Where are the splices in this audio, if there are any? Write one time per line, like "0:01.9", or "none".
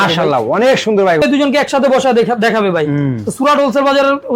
0:01.2